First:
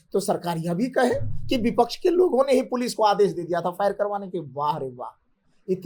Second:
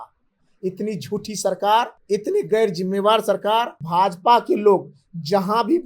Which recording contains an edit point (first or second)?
second